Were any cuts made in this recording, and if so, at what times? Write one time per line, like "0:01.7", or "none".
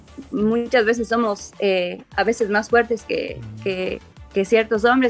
0:04.1